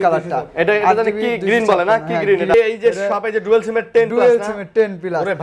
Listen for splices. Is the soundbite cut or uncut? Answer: cut